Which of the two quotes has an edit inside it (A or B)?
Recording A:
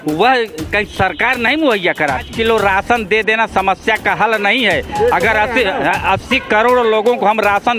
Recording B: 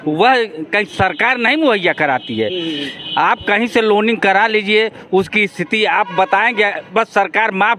A